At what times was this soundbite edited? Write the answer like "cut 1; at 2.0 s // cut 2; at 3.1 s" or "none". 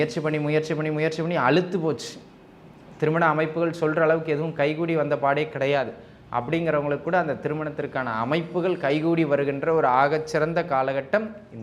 none